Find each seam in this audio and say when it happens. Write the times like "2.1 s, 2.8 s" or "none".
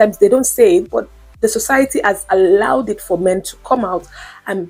none